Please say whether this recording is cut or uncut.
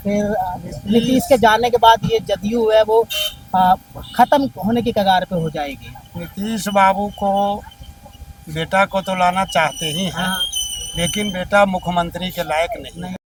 uncut